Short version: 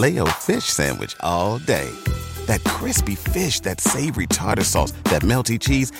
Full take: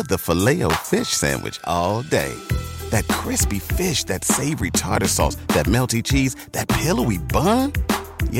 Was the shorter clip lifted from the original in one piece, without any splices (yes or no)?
yes